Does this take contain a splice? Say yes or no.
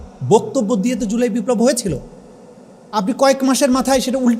no